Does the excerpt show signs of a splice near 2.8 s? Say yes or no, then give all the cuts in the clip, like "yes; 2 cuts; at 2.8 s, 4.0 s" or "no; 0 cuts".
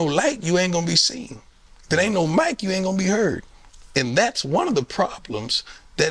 no; 0 cuts